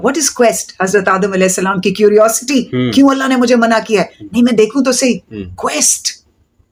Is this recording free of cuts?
yes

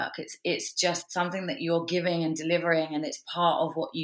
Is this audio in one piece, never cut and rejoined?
yes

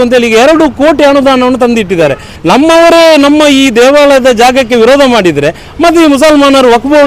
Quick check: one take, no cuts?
no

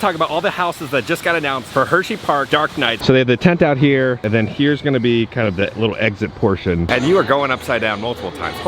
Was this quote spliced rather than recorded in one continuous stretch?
yes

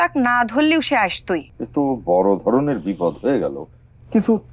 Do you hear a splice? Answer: yes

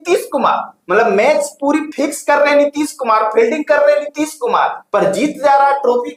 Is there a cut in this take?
no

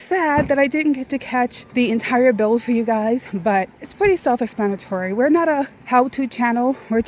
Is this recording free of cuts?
no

